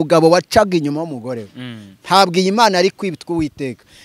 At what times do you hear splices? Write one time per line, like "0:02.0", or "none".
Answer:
none